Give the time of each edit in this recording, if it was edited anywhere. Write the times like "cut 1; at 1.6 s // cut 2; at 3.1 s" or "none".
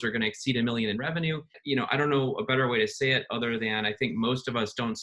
cut 1; at 1.5 s